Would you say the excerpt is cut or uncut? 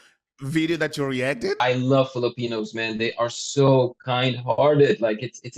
cut